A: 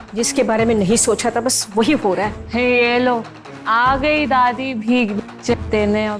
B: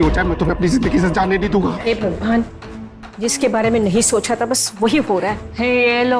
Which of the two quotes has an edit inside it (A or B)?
B